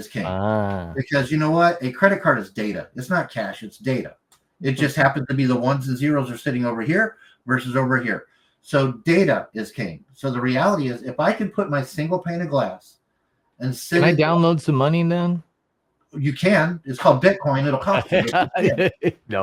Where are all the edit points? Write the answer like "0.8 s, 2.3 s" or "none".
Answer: none